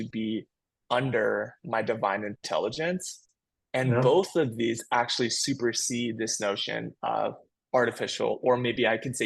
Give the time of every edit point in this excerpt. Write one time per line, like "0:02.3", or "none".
none